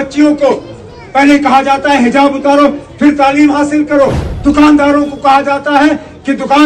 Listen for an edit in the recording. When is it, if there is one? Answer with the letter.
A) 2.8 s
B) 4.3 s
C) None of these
B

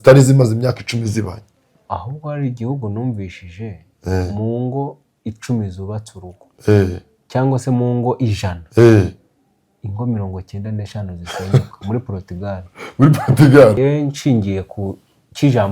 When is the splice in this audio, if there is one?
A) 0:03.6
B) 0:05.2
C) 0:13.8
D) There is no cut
C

